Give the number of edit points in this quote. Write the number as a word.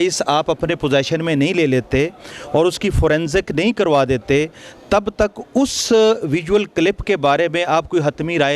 zero